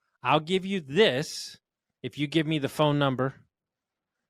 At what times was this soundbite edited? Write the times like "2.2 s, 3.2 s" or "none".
none